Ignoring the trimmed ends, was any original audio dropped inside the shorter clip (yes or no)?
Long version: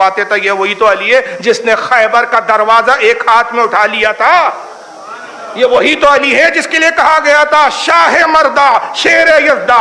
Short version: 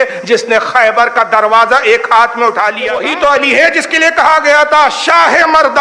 yes